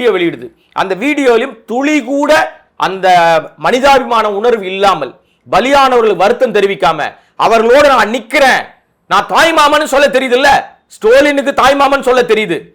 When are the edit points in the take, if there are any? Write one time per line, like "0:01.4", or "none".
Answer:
none